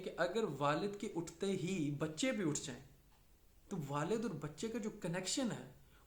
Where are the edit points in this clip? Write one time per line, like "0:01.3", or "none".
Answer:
none